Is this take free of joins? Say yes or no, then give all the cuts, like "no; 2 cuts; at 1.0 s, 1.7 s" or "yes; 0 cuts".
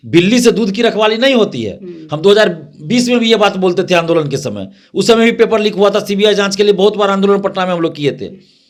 yes; 0 cuts